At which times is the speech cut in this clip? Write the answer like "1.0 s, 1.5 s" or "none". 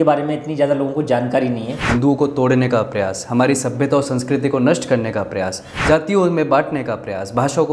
1.8 s, 5.7 s